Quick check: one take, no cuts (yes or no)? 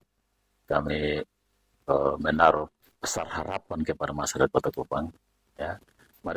yes